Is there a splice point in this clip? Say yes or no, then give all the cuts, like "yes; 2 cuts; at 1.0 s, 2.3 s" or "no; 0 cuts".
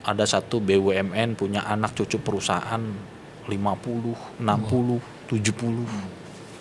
no; 0 cuts